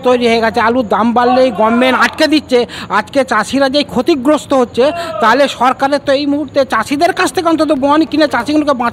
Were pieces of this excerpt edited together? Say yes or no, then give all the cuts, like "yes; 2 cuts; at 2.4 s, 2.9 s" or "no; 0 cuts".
no; 0 cuts